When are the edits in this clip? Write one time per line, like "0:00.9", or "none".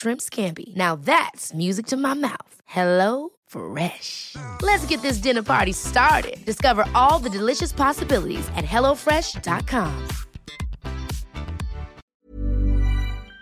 0:12.0